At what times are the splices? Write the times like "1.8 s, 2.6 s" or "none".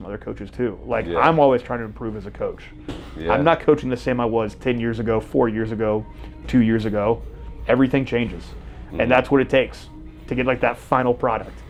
none